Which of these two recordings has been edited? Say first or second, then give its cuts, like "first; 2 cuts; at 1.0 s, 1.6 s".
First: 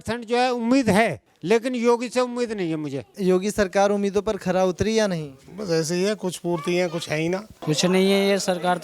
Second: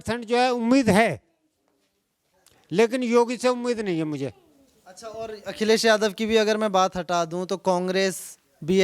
first; 3 cuts; at 1.3 s, 3.1 s, 7.5 s